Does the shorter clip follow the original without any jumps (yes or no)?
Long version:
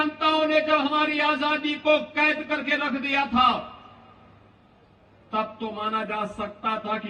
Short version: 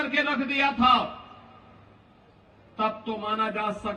yes